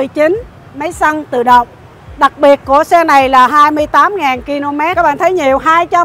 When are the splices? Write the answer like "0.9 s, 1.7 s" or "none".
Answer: 4.9 s